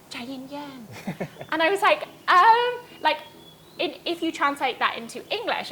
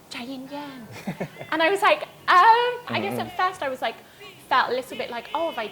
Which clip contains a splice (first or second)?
second